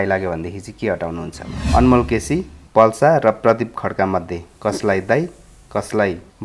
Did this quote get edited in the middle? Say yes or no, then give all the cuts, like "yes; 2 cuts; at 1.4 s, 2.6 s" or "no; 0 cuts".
yes; 1 cut; at 1.5 s